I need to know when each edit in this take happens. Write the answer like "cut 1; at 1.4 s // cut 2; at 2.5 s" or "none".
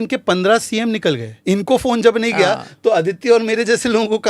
cut 1; at 1.3 s